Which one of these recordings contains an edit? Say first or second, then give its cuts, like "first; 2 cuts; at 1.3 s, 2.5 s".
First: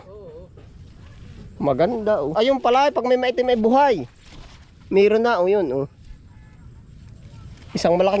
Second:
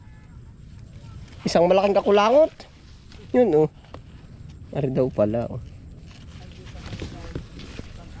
first; 1 cut; at 2.3 s